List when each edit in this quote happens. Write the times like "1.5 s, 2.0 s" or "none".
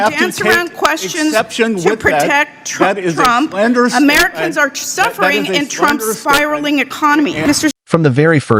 7.6 s